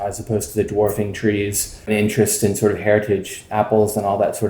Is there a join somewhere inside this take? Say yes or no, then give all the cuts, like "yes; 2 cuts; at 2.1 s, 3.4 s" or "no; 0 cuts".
yes; 1 cut; at 1.9 s